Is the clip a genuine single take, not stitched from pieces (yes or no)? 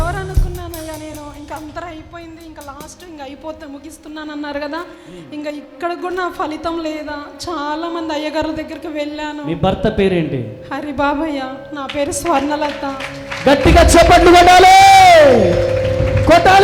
yes